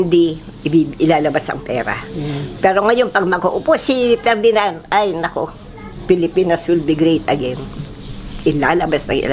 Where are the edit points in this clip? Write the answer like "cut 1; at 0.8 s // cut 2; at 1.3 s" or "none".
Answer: none